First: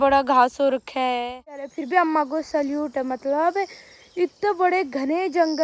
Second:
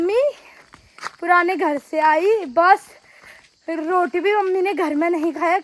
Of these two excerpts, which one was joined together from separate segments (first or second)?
first